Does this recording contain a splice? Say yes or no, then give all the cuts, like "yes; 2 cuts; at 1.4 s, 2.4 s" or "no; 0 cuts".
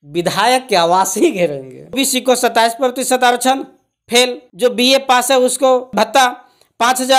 yes; 3 cuts; at 2.0 s, 4.4 s, 5.9 s